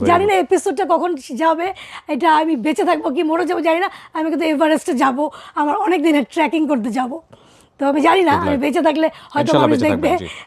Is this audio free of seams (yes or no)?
yes